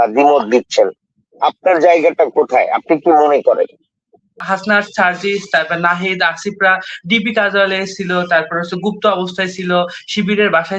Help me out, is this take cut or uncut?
cut